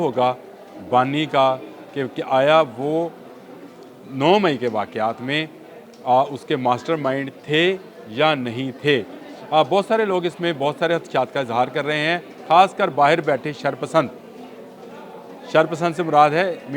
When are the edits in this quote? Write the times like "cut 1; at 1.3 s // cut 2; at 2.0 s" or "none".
none